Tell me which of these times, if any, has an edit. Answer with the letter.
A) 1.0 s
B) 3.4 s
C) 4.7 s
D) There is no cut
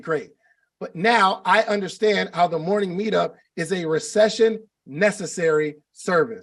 D